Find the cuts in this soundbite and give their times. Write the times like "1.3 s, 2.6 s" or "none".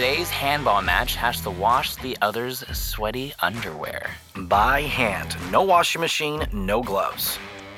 none